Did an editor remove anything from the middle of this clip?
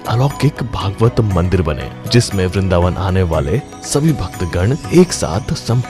no; 0 cuts

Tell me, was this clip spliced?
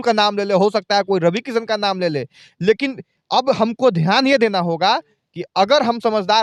no; 0 cuts

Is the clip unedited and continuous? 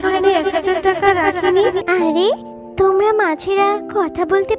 no; 1 cut; at 1.8 s

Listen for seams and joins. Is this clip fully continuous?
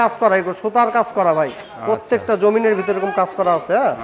yes; 0 cuts

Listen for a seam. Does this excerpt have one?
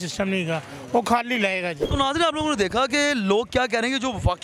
no; 0 cuts

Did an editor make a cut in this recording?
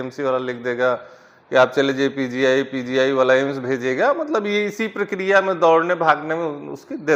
no; 0 cuts

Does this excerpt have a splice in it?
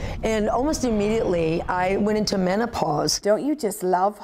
yes; 1 cut; at 3.2 s

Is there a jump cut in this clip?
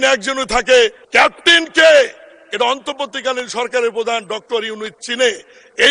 yes; 1 cut; at 1.0 s

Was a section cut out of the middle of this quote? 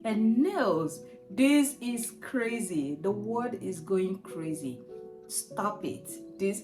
no; 0 cuts

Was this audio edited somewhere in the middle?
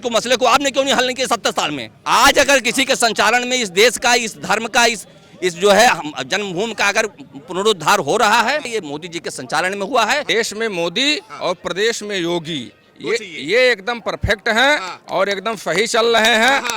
yes; 3 cuts; at 1.9 s, 8.7 s, 10.3 s

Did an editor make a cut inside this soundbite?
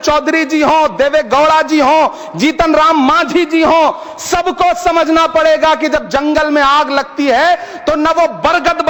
no; 0 cuts

